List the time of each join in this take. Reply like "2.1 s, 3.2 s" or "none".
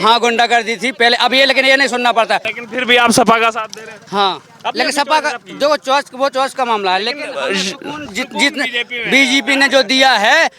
2.5 s